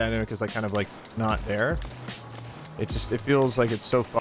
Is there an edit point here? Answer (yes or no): no